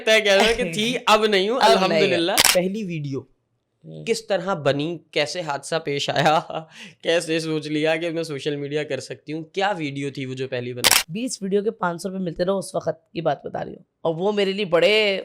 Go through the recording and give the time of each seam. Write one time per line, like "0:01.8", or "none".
0:02.4
0:10.9